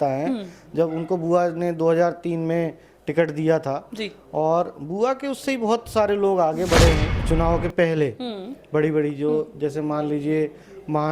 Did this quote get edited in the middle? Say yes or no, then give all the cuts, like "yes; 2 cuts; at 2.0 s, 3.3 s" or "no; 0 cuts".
yes; 1 cut; at 7.1 s